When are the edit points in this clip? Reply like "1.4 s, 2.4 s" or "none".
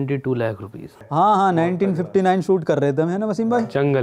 1.0 s